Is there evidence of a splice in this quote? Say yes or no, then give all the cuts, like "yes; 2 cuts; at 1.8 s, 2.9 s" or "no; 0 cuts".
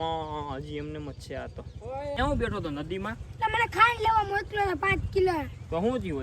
yes; 1 cut; at 2.2 s